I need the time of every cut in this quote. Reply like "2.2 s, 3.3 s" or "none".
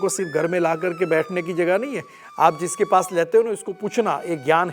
none